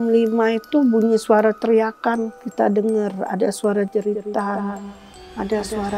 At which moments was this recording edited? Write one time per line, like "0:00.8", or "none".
0:02.4